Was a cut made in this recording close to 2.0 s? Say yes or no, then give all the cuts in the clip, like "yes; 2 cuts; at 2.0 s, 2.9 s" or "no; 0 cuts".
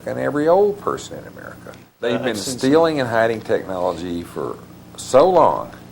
yes; 1 cut; at 2.0 s